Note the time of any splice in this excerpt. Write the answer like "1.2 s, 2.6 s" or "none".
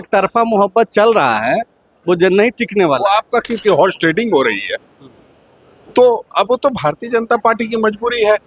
3.6 s